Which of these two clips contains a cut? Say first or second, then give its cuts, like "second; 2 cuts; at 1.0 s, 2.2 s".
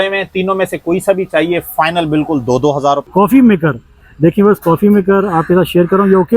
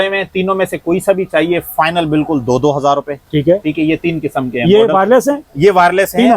first; 1 cut; at 3.1 s